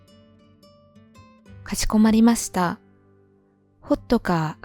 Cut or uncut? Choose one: cut